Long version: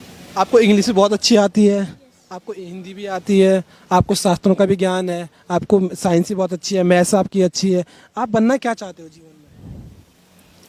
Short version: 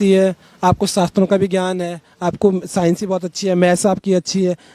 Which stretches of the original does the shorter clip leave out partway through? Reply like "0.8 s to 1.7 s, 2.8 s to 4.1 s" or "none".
none